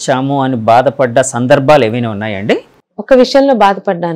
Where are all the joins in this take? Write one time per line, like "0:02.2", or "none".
0:02.7